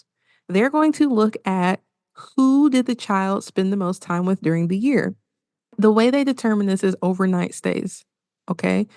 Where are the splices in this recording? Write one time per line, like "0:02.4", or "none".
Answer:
0:05.8